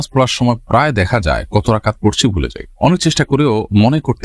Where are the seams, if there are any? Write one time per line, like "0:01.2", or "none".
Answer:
none